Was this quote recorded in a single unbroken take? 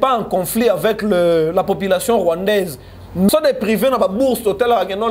no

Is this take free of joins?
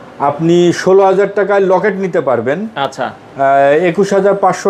yes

